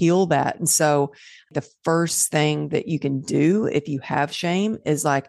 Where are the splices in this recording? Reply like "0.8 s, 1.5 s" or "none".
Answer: 1.5 s